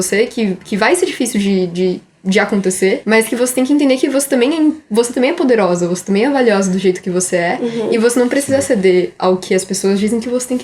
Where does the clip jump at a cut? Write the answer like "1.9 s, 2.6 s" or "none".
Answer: 3.0 s